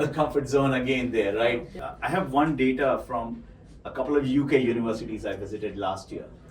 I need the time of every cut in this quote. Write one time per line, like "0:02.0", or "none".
0:01.8